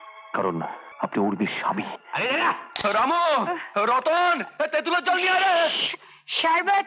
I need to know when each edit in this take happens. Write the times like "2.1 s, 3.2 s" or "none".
0.9 s, 2.8 s